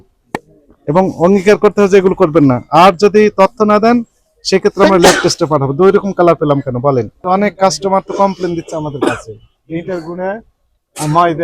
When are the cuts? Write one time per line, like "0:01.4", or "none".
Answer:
0:07.1

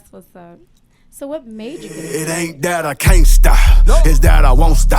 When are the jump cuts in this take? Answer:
0:01.8

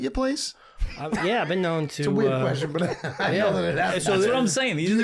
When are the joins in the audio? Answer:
none

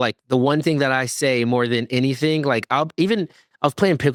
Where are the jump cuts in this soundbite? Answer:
none

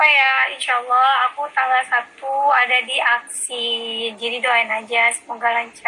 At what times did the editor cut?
none

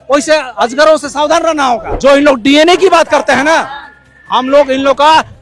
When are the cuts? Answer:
0:01.9

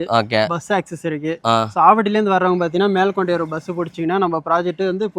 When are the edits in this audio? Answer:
none

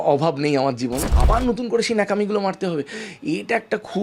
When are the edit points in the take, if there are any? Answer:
0:01.1

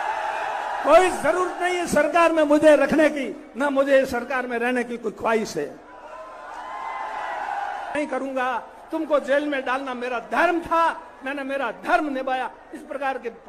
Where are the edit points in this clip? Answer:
0:07.9

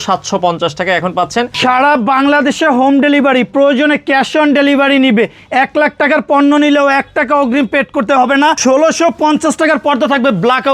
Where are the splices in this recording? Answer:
0:01.5
0:08.6

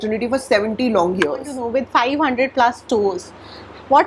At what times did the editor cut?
0:01.6

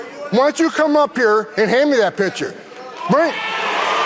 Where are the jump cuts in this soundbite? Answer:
none

